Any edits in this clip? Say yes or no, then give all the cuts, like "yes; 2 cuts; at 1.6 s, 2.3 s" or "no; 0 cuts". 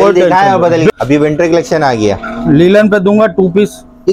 yes; 1 cut; at 0.9 s